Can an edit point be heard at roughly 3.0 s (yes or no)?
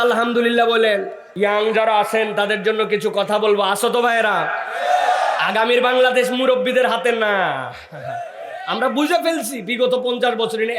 no